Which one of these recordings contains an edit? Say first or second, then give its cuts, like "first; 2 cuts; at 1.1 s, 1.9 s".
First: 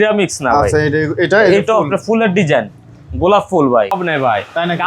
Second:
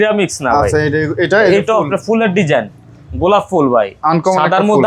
first; 1 cut; at 4.0 s